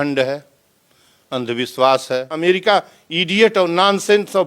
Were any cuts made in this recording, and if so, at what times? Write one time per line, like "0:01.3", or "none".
0:02.3